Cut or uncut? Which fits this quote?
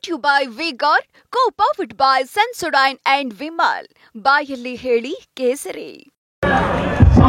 cut